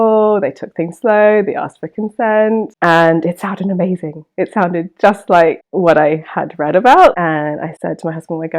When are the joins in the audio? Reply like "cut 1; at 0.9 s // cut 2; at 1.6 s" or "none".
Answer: cut 1; at 2.7 s // cut 2; at 7.2 s